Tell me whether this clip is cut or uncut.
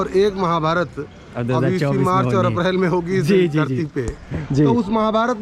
uncut